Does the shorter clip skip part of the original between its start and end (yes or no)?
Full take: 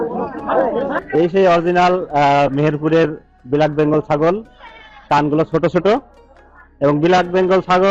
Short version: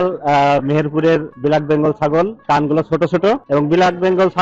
yes